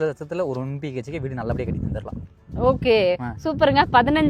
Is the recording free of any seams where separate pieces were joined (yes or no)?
yes